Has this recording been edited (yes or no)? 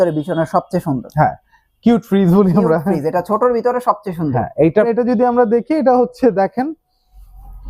yes